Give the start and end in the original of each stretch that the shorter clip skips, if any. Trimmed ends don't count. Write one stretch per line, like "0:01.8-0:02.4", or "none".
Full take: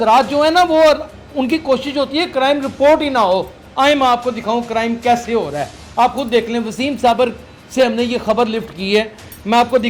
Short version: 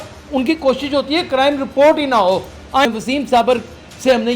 0:03.9-0:06.6

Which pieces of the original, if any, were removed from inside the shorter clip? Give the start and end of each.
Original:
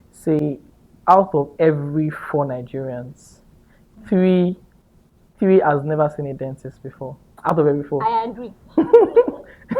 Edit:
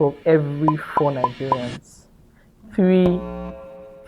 none

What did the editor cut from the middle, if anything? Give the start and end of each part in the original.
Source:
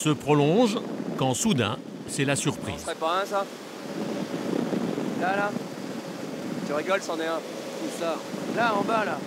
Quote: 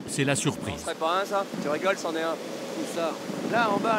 0:03.5-0:06.6

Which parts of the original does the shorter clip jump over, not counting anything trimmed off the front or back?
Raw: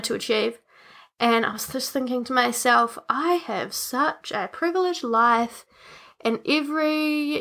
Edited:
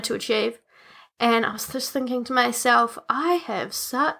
none

